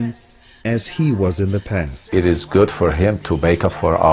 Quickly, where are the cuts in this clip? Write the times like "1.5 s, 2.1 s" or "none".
2.0 s